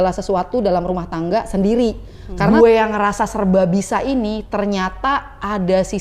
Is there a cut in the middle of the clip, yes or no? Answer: yes